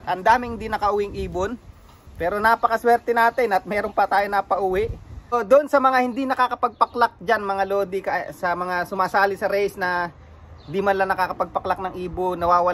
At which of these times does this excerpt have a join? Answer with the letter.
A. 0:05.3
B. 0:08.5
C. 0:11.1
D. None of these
A